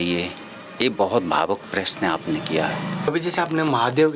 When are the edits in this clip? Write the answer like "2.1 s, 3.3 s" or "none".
3.1 s